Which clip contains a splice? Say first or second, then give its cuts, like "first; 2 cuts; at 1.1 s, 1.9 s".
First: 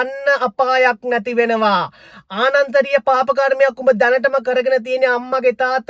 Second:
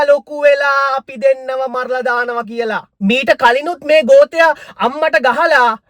second; 1 cut; at 2.9 s